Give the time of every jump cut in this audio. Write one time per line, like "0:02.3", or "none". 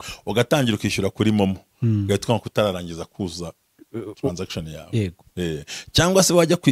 none